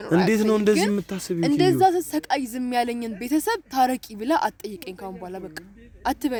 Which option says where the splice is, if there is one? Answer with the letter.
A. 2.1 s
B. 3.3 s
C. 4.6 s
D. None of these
D